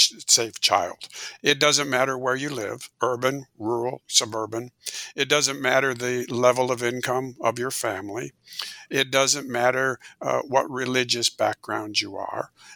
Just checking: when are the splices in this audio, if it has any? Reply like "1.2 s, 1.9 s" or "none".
1.2 s, 2.8 s

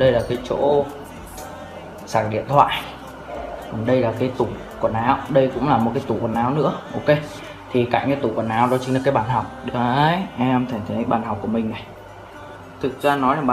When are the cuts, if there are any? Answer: 2.5 s

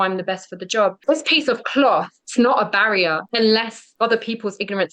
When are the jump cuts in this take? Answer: 1.0 s, 2.2 s, 3.2 s, 3.8 s

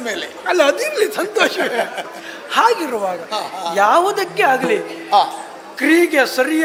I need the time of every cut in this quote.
none

